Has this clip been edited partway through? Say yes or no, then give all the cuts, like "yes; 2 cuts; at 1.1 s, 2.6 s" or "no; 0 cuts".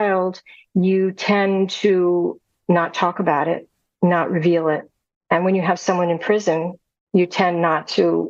no; 0 cuts